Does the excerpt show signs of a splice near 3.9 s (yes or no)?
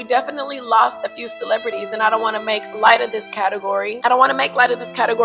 yes